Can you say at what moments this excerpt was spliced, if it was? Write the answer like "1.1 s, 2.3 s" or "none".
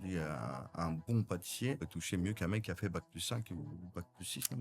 1.8 s